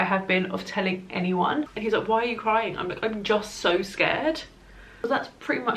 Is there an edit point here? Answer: yes; 2 cuts; at 1.7 s, 4.9 s

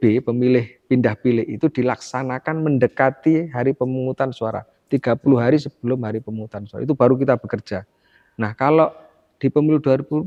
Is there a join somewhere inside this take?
no; 0 cuts

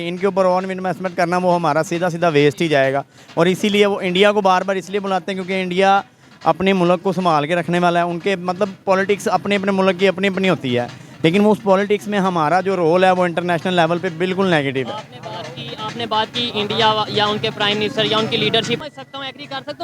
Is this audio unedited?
no; 1 cut; at 18.8 s

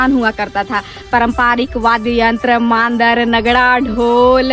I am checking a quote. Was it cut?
yes; 1 cut; at 0.9 s

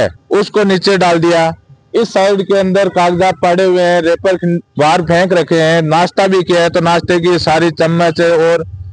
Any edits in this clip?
no; 0 cuts

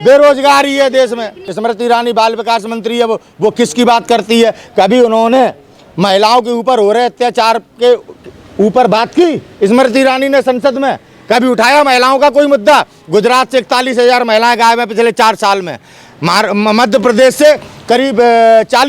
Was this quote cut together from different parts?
yes; 1 cut; at 1.5 s

